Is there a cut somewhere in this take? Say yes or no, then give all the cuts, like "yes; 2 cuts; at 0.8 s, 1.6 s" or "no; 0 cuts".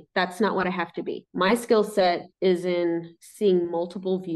no; 0 cuts